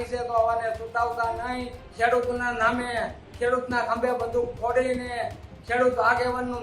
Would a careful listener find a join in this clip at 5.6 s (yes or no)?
no